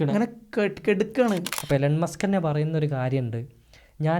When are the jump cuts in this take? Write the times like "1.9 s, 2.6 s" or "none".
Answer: 1.5 s